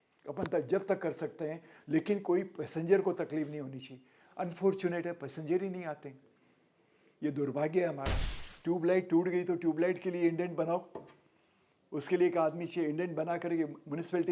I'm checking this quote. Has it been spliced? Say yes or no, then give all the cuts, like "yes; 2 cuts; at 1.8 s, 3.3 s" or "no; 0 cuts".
yes; 1 cut; at 8.3 s